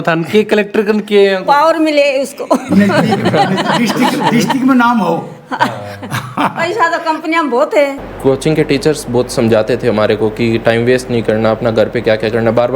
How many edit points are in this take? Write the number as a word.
one